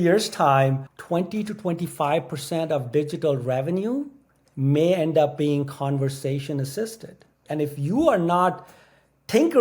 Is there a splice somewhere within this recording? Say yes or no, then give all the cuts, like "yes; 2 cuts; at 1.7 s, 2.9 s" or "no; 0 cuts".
yes; 2 cuts; at 0.9 s, 7.4 s